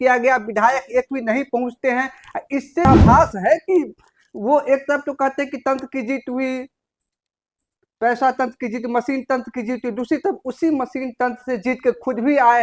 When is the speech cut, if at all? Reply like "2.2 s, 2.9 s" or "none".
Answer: 2.9 s